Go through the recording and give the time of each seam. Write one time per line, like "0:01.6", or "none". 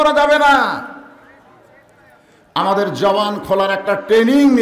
none